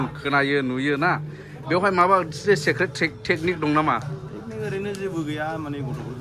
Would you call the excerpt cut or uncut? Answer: uncut